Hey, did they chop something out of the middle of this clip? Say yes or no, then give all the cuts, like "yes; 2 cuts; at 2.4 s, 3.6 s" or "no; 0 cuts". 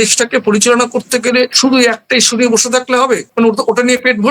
yes; 2 cuts; at 1.5 s, 3.3 s